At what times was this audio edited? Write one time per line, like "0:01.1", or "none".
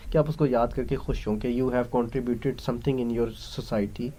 none